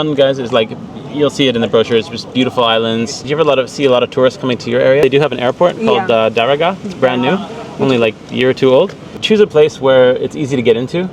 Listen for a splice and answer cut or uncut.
cut